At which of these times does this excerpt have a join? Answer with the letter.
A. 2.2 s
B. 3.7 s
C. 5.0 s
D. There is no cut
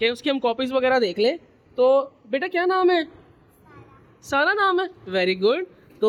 D